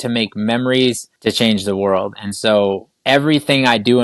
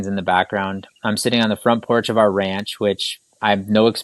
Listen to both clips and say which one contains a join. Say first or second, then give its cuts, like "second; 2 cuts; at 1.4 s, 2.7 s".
first; 2 cuts; at 1.1 s, 2.9 s